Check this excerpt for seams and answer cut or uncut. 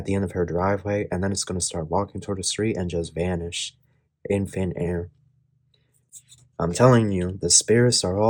uncut